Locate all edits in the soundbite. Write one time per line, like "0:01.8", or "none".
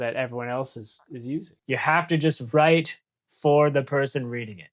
0:01.5